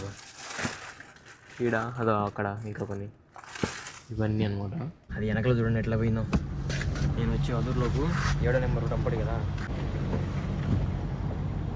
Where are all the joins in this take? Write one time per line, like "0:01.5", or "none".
0:05.1
0:09.7

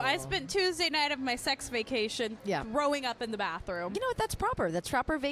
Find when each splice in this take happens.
none

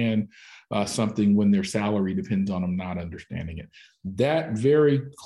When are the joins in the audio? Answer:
none

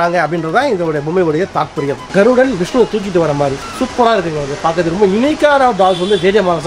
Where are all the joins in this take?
0:02.0

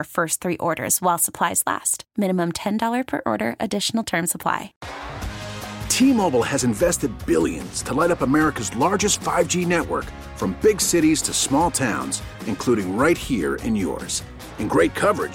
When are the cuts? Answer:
0:04.8

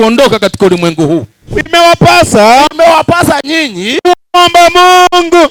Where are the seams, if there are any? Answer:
0:01.5

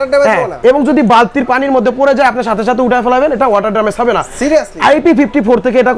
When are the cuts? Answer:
none

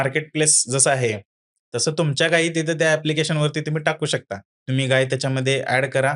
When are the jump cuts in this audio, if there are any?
0:04.5

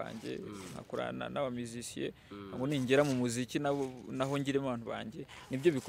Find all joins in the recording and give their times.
none

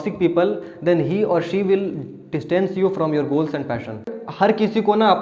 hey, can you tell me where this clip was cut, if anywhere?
0:04.0

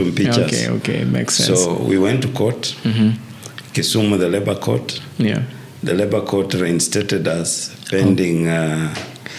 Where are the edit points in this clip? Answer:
none

